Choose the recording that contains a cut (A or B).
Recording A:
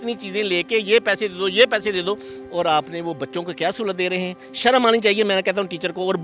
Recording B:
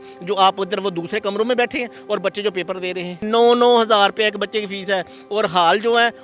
B